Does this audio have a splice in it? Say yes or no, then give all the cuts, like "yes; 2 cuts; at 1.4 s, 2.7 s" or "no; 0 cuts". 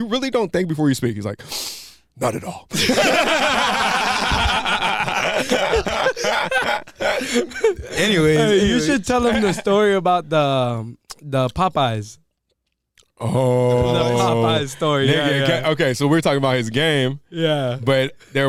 no; 0 cuts